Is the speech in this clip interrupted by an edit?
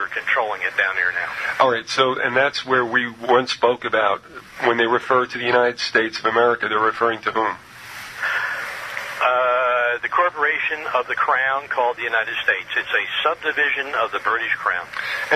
yes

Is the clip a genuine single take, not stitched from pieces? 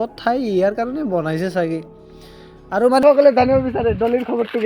no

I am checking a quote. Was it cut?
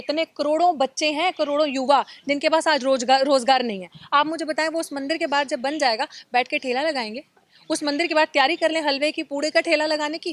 no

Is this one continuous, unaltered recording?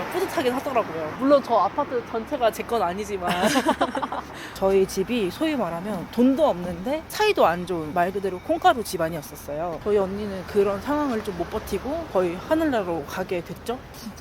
no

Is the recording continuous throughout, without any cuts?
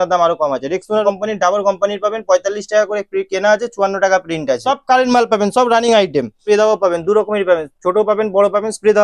no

